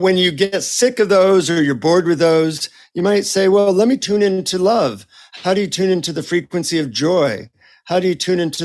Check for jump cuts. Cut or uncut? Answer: cut